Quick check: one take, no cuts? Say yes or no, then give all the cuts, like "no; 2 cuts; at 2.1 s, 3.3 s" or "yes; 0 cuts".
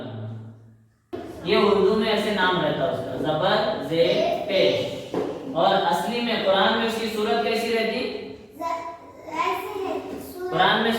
no; 1 cut; at 1.0 s